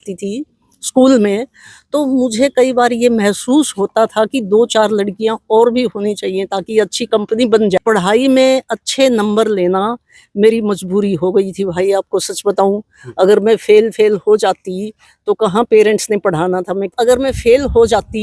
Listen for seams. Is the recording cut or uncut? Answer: cut